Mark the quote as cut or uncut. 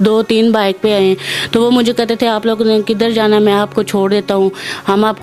uncut